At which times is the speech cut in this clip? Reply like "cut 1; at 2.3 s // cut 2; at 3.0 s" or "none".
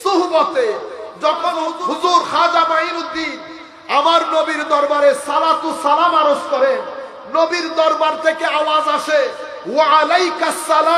none

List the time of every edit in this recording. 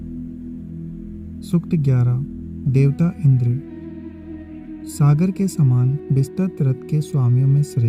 cut 1; at 1.5 s // cut 2; at 3.5 s // cut 3; at 4.8 s

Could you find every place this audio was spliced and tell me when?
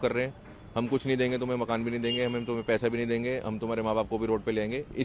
none

